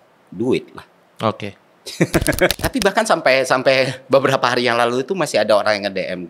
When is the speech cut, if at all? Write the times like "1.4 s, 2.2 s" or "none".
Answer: 2.5 s